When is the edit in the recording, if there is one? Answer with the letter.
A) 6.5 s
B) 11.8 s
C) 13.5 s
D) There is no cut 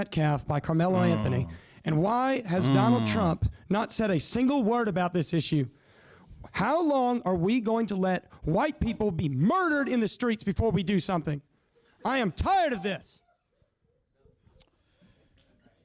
D